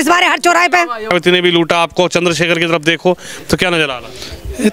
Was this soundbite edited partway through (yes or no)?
yes